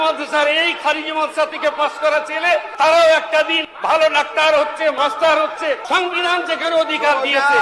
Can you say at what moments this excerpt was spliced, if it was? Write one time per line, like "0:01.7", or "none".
0:02.7
0:03.7
0:04.9
0:05.8